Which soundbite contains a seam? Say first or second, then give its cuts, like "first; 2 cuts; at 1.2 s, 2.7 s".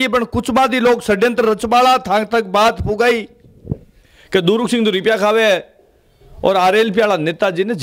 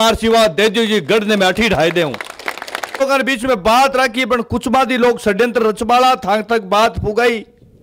second; 1 cut; at 3.0 s